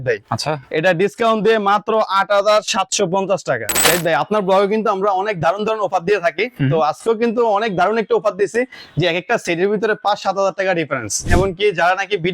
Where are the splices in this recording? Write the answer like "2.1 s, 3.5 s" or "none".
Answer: 3.8 s, 11.2 s